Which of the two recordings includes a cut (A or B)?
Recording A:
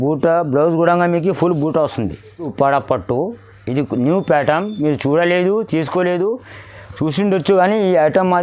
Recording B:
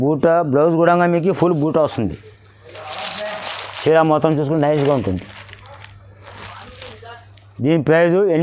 A